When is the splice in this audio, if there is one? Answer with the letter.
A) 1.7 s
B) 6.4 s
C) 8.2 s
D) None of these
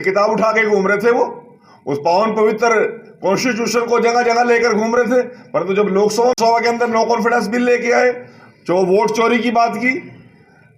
B